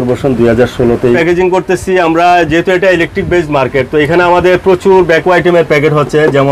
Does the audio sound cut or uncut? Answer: cut